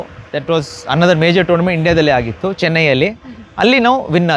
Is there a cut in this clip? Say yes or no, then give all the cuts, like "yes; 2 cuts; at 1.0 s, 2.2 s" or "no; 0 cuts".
no; 0 cuts